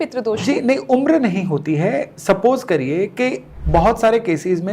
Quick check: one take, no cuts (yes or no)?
no